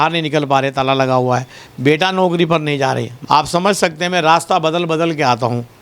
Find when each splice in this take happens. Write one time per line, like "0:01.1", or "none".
0:03.1